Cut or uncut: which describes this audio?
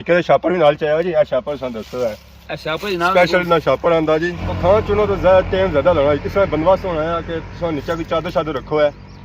cut